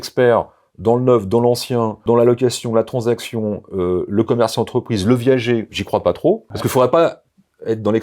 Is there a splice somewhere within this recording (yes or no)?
yes